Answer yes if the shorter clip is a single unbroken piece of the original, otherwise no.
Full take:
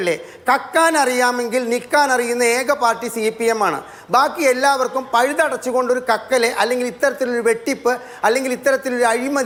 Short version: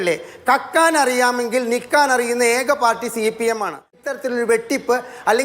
no